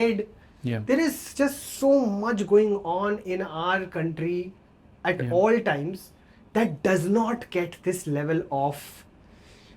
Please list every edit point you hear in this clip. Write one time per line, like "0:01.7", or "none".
none